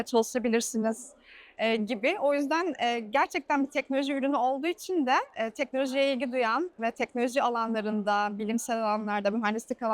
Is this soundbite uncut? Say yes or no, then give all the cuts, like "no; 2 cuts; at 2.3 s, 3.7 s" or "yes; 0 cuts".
yes; 0 cuts